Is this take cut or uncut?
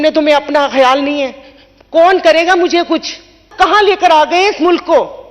cut